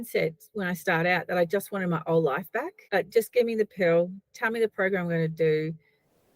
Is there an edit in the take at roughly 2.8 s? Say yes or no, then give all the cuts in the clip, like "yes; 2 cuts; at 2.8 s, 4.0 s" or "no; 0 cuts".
yes; 1 cut; at 2.8 s